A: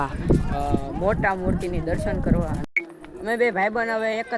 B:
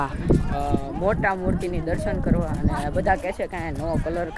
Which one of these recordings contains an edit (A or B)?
A